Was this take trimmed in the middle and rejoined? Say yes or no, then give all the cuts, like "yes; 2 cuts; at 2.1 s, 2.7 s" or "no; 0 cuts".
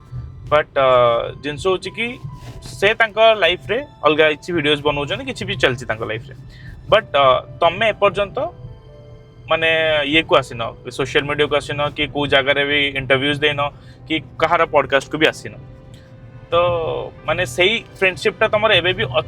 no; 0 cuts